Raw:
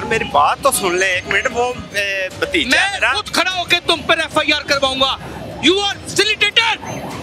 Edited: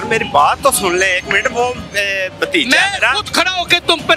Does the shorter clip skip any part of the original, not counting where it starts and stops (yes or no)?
no